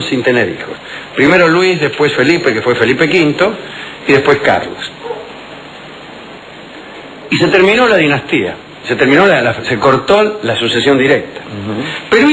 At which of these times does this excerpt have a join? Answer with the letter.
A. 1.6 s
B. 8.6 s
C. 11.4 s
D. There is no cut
A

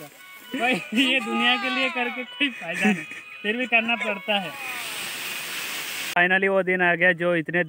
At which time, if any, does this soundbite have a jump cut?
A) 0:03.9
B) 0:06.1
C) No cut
B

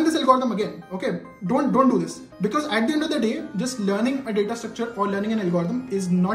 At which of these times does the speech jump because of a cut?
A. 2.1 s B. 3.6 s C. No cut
C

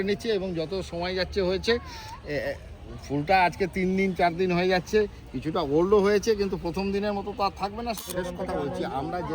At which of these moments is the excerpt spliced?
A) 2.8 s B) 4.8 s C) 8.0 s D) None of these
C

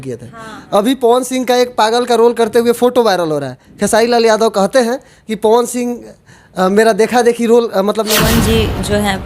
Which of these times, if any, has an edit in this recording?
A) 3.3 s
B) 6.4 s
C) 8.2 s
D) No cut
C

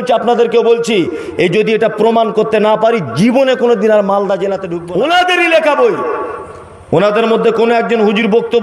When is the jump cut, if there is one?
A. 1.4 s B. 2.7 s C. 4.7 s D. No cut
C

